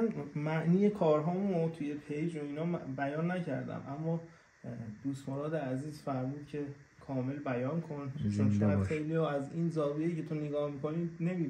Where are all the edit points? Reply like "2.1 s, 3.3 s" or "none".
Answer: none